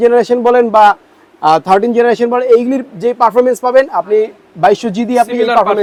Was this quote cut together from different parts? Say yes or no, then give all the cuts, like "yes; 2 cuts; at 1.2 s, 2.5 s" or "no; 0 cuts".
no; 0 cuts